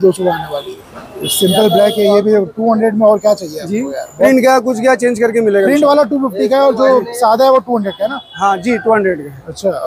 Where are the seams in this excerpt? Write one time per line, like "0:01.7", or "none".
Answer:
none